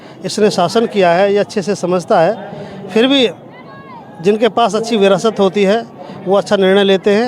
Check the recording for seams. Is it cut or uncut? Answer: uncut